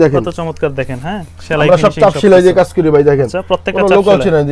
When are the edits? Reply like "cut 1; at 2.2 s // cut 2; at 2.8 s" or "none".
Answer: none